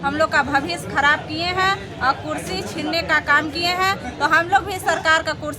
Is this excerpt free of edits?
yes; 0 cuts

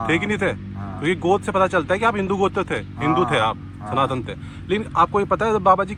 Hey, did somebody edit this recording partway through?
no; 0 cuts

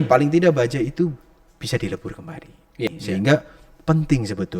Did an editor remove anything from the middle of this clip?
yes; 1 cut; at 2.9 s

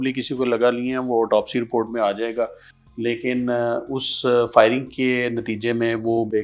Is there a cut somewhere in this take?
no; 0 cuts

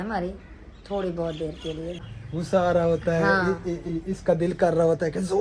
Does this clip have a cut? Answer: yes; 1 cut; at 2.0 s

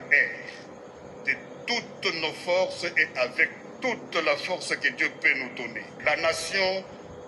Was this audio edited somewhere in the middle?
yes; 1 cut; at 6.0 s

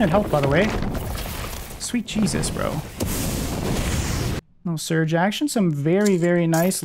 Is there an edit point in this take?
yes; 1 cut; at 4.4 s

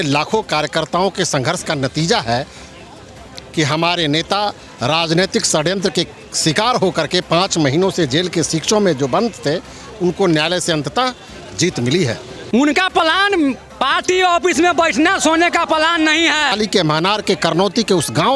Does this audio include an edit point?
yes; 2 cuts; at 12.3 s, 16.5 s

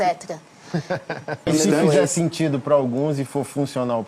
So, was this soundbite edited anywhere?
yes; 1 cut; at 1.5 s

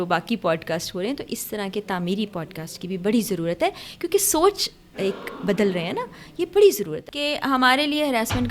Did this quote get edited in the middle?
yes; 1 cut; at 7.0 s

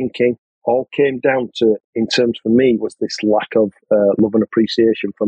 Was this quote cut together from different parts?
no; 0 cuts

